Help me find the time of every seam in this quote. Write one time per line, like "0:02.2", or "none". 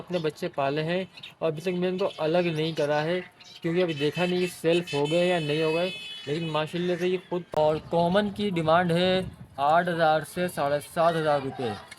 0:07.6